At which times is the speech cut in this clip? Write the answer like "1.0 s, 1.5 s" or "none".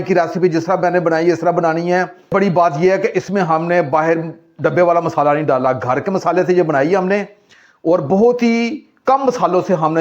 2.3 s

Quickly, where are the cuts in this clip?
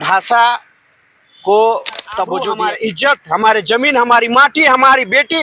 2.5 s

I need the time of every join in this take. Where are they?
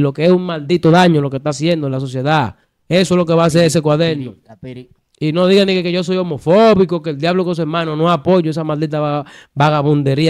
none

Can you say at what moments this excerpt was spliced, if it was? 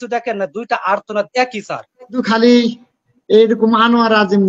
2.2 s

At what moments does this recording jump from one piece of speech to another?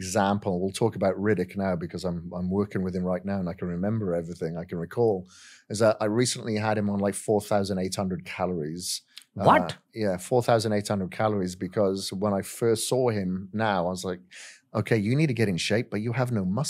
none

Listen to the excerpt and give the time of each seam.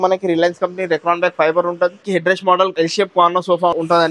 2.0 s

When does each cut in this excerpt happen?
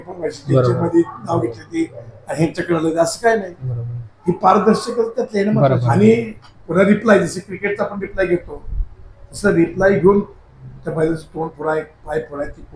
5.8 s

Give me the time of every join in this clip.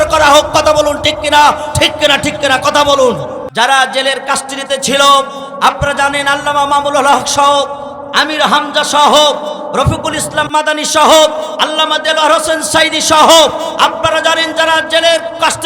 3.4 s

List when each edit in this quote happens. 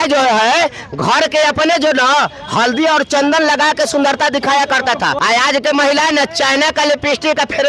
5.1 s

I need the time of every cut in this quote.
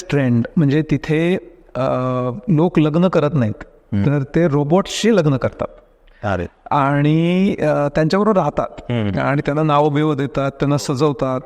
none

